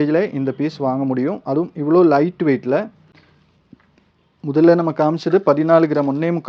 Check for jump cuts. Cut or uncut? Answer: uncut